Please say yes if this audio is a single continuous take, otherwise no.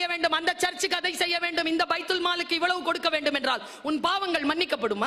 yes